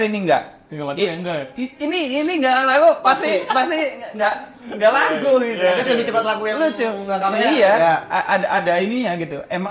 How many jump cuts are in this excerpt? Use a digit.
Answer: 0